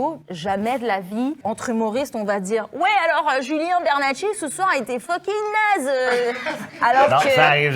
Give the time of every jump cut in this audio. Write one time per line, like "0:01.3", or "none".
0:01.4